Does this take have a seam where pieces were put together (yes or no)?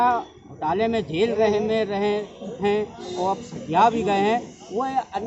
no